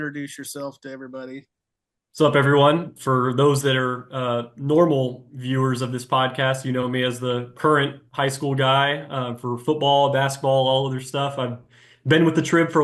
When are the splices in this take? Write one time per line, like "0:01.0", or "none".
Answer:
none

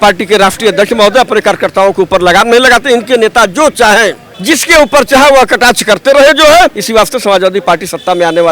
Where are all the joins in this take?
0:06.8

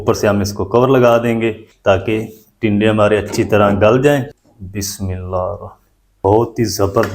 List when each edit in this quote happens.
0:01.7
0:04.3
0:06.1

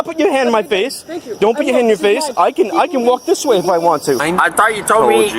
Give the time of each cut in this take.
0:04.2

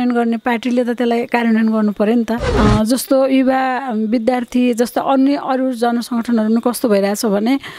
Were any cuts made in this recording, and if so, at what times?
0:02.4

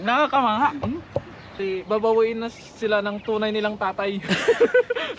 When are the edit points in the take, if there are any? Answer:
0:01.6

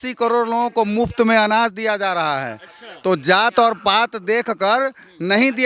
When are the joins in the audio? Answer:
none

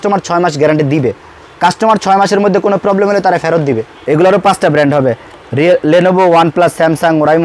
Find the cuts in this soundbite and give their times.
0:03.9

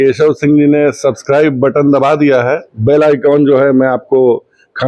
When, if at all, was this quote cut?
none

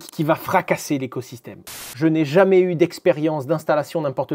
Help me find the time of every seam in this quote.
0:01.9

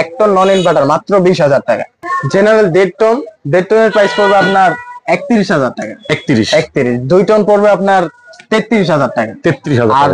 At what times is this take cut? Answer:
0:01.9

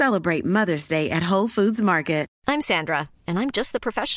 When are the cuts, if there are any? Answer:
0:02.3

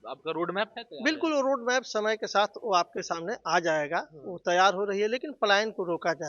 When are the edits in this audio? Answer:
none

